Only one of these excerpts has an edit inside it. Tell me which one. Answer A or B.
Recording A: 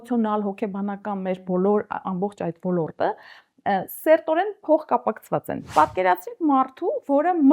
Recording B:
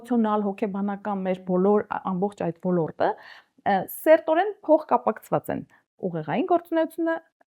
A